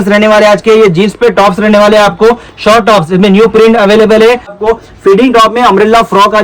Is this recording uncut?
no; 1 cut; at 4.5 s

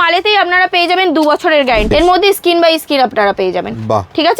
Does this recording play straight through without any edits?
no; 1 cut; at 1.9 s

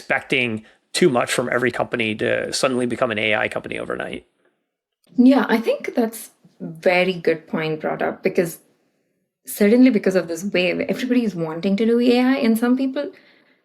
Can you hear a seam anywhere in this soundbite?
no; 0 cuts

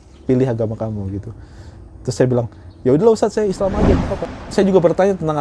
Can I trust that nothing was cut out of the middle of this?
no; 1 cut; at 4.4 s

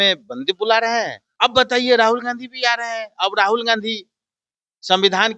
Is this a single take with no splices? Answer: no; 1 cut; at 1.2 s

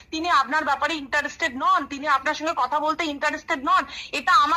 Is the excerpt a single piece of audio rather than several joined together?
yes; 0 cuts

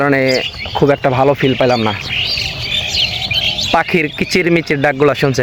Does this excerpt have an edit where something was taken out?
no; 0 cuts

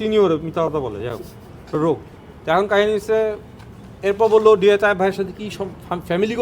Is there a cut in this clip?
no; 0 cuts

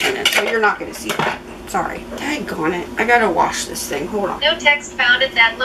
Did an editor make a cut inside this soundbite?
yes; 2 cuts; at 2.2 s, 4.4 s

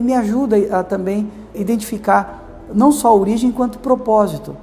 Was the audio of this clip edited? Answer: yes; 1 cut; at 1.6 s

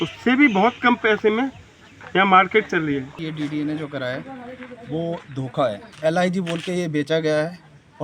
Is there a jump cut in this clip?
yes; 2 cuts; at 3.1 s, 5.9 s

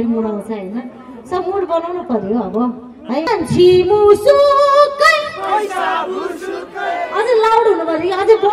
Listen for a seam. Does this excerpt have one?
yes; 1 cut; at 3.3 s

